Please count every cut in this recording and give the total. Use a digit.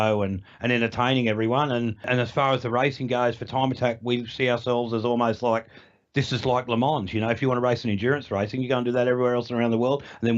1